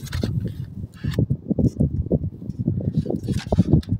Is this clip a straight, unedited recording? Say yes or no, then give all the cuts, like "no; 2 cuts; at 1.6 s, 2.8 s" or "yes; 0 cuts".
yes; 0 cuts